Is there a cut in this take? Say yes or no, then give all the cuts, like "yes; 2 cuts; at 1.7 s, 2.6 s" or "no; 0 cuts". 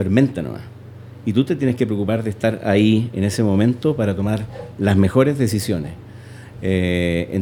no; 0 cuts